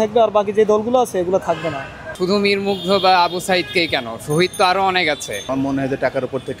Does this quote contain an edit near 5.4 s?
yes; 2 cuts; at 2.1 s, 5.4 s

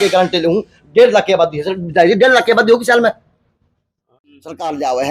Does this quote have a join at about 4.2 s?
yes; 1 cut; at 4.2 s

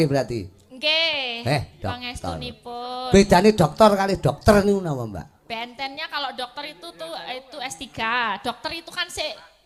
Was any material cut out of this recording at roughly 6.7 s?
no; 0 cuts

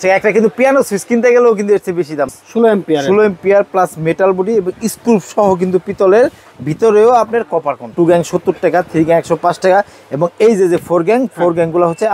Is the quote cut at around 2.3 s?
yes; 2 cuts; at 2.3 s, 7.9 s

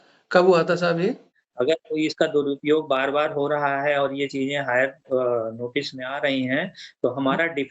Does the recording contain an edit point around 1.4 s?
yes; 1 cut; at 1.4 s

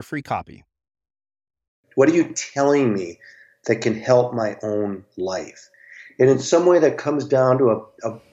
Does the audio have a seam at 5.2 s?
no; 1 cut; at 1.8 s

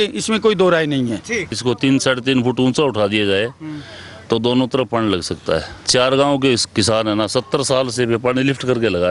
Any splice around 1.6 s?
yes; 2 cuts; at 1.6 s, 5.8 s

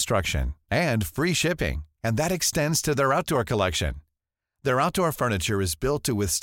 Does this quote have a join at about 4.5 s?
no; 0 cuts

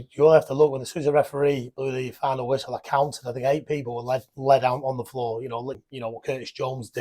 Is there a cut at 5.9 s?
yes; 1 cut; at 5.9 s

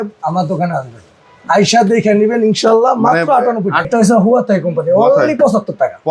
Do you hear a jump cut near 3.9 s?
yes; 1 cut; at 3.9 s

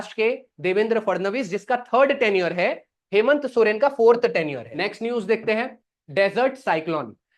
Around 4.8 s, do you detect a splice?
yes; 1 cut; at 4.8 s

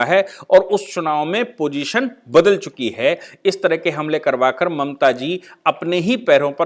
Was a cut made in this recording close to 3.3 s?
no; 0 cuts

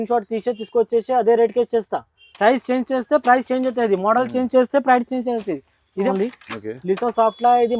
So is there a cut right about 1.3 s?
no; 1 cut; at 6.1 s

